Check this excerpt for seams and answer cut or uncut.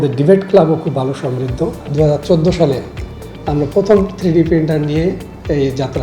cut